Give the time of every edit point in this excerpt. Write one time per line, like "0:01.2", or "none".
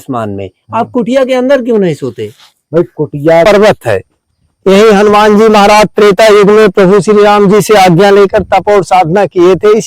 0:03.4